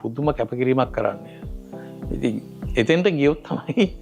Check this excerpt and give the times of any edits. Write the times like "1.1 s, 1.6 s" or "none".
none